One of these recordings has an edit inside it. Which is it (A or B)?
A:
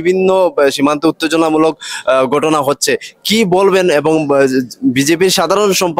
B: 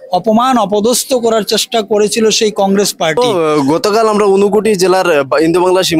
B